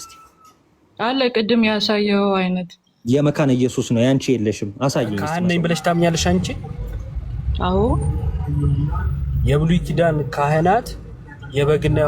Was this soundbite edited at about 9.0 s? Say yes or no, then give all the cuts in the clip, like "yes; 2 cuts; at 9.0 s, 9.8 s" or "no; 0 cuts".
no; 1 cut; at 5.2 s